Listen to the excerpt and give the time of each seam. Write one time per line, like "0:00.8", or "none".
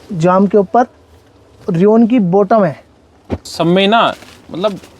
0:03.5